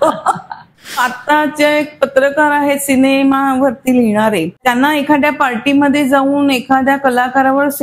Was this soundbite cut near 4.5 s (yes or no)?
yes